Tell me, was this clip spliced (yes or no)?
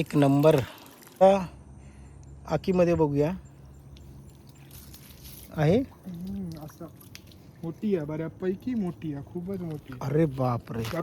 yes